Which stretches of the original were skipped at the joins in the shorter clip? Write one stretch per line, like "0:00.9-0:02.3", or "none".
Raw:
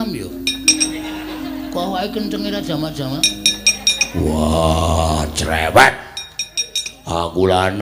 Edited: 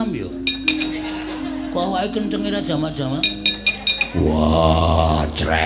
none